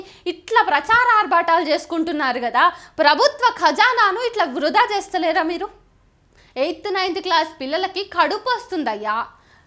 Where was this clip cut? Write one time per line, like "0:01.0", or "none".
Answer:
0:06.3